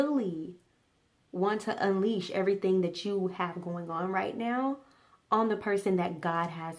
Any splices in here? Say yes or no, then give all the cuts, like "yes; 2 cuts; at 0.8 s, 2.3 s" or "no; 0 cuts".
no; 0 cuts